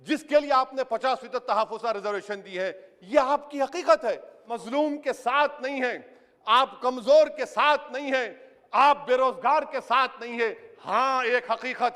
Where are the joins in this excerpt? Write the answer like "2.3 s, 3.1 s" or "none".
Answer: 4.5 s